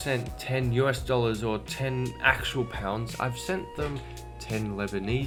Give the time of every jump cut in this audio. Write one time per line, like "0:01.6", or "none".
none

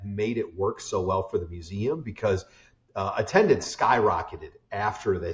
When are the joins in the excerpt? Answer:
none

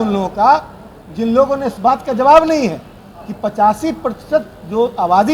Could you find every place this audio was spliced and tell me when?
0:01.7

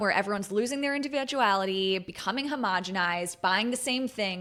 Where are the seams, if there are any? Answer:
none

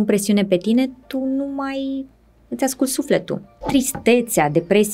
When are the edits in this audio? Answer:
0:03.6

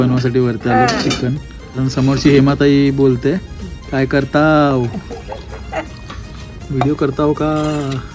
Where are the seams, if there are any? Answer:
0:01.8

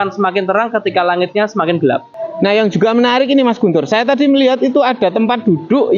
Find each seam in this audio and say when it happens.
0:02.1

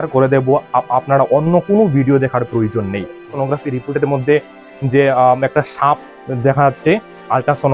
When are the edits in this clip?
0:03.2

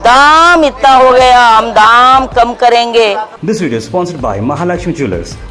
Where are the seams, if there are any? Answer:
0:03.3

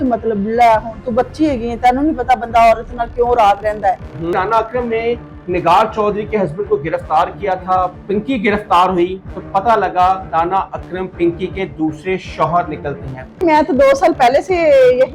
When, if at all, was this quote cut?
0:04.3
0:08.0
0:13.4

